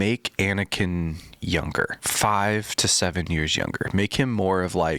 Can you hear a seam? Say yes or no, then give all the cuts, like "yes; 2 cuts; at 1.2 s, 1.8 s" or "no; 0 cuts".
yes; 1 cut; at 2.0 s